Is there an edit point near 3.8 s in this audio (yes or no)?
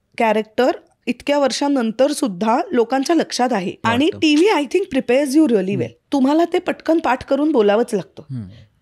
yes